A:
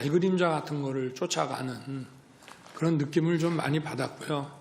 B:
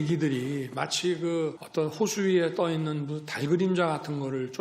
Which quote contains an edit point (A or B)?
B